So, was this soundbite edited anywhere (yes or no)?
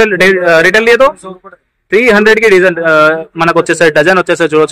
no